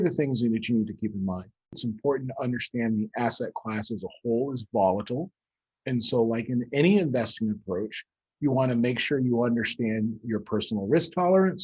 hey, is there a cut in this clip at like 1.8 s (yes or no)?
yes